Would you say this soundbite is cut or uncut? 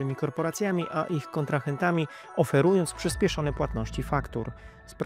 uncut